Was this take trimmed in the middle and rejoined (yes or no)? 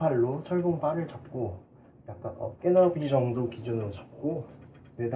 no